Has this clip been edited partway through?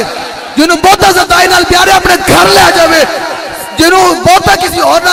no; 0 cuts

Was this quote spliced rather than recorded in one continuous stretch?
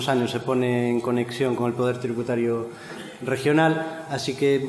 no; 0 cuts

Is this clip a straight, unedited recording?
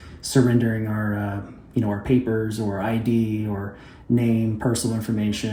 yes; 0 cuts

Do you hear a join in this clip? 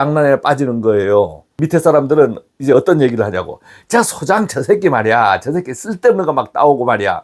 yes; 1 cut; at 1.6 s

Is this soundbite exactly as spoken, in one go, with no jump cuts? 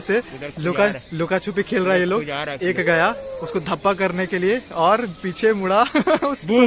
yes; 0 cuts

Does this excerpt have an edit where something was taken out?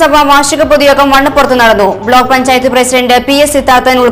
no; 0 cuts

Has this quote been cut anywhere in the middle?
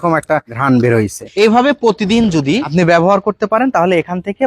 yes; 1 cut; at 1.2 s

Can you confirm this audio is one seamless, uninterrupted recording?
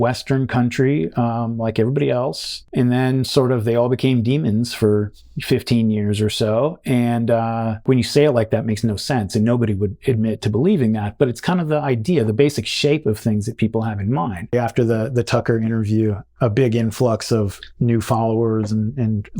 no; 3 cuts; at 2.6 s, 7.8 s, 14.5 s

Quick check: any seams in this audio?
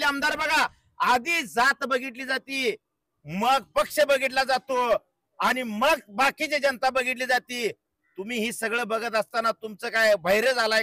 no; 0 cuts

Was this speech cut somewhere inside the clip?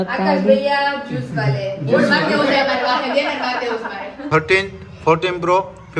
yes; 1 cut; at 4.3 s

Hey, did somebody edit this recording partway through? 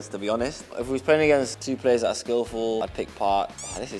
yes; 2 cuts; at 1.6 s, 2.8 s

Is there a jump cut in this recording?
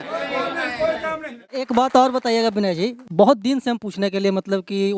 yes; 1 cut; at 1.6 s

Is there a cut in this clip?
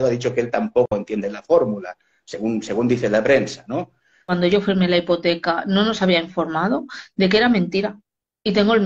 yes; 1 cut; at 4.3 s

